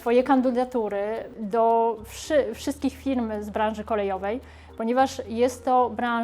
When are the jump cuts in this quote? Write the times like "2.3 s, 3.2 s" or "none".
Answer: none